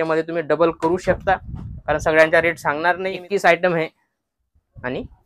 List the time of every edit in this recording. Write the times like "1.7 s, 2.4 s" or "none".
3.1 s